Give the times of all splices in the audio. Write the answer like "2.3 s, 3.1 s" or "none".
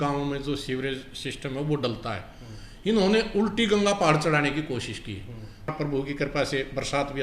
5.7 s